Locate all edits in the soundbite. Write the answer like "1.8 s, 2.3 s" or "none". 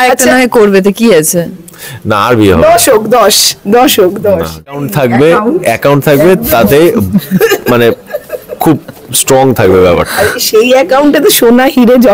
4.7 s